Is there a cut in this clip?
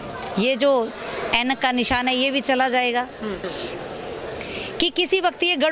yes; 1 cut; at 3.5 s

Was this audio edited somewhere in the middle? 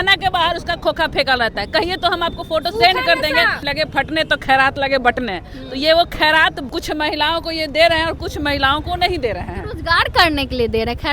yes; 2 cuts; at 3.6 s, 6.7 s

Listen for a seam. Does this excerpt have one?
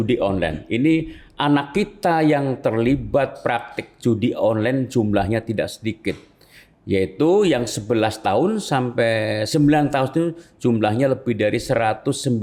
no; 0 cuts

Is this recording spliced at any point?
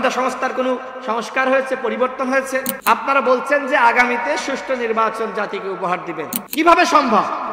yes; 2 cuts; at 2.7 s, 6.4 s

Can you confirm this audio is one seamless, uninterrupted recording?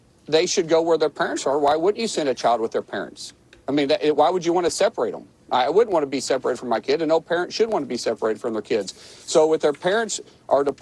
yes; 0 cuts

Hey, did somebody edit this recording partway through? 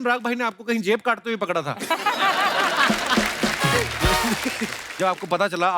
yes; 1 cut; at 4.8 s

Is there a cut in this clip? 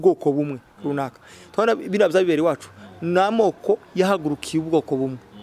no; 0 cuts

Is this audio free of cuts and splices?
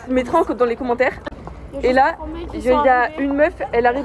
yes; 0 cuts

